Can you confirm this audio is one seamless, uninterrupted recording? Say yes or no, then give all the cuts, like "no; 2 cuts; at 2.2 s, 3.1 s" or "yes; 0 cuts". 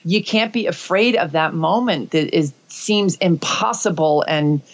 yes; 0 cuts